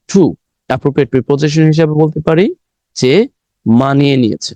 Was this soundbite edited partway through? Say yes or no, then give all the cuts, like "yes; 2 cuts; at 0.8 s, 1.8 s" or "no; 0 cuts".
no; 0 cuts